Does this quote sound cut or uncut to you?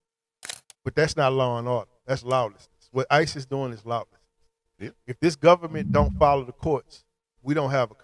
uncut